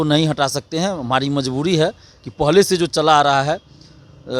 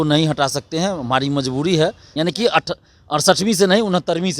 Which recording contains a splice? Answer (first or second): second